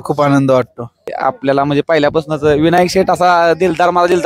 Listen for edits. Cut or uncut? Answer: cut